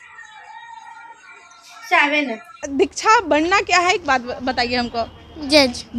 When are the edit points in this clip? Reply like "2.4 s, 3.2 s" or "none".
2.6 s